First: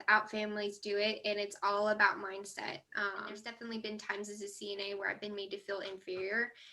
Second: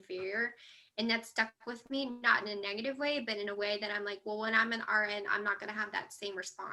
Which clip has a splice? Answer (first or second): first